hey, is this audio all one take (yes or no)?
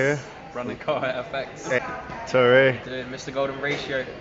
no